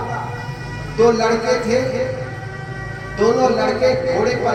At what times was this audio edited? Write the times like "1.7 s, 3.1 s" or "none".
none